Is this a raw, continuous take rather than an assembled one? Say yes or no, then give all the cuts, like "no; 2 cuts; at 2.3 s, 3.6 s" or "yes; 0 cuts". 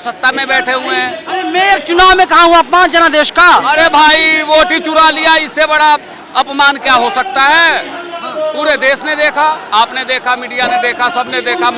yes; 0 cuts